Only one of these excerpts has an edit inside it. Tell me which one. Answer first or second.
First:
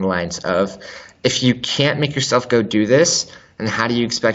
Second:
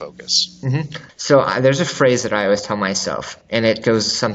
second